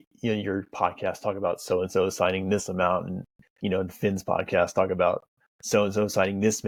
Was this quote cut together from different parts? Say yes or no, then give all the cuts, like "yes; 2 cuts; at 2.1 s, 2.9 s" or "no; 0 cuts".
no; 0 cuts